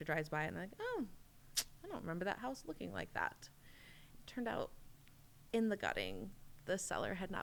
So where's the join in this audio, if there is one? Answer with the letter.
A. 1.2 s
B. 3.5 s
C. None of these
C